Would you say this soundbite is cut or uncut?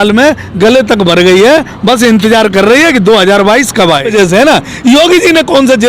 cut